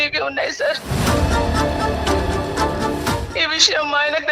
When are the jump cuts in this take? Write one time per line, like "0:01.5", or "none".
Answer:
0:03.2

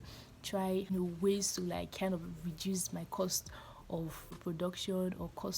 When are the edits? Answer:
0:00.9
0:04.4

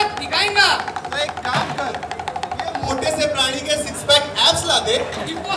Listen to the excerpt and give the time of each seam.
none

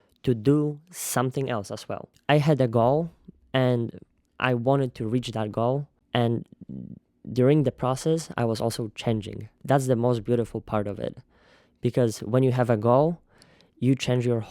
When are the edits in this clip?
0:02.1
0:05.9
0:09.6

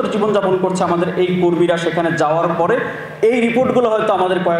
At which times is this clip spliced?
none

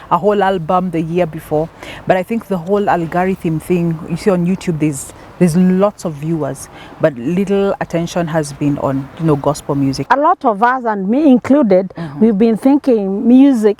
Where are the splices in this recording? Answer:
0:10.0

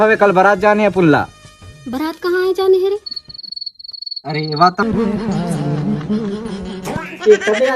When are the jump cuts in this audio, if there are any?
0:04.8

